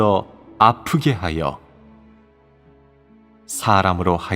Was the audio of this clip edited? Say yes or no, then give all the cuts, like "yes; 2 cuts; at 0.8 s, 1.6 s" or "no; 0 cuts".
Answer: yes; 1 cut; at 1.1 s